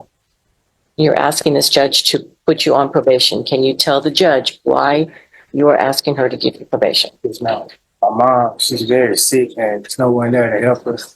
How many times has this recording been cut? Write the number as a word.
one